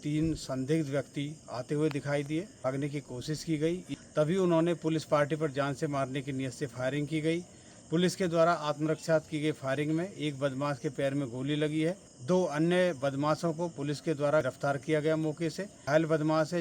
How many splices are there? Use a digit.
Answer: 5